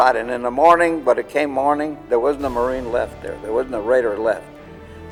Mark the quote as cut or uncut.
uncut